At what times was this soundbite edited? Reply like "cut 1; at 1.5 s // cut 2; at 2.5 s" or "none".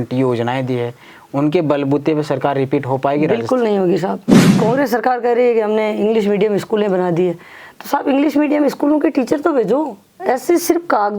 cut 1; at 4.5 s